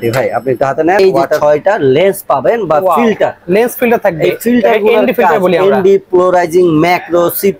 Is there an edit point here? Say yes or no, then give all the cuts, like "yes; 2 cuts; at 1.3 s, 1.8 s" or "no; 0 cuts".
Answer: yes; 1 cut; at 1.0 s